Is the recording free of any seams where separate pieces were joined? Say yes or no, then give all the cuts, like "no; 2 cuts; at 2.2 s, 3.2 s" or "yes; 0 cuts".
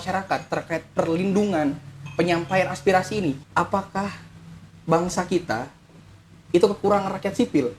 no; 1 cut; at 3.4 s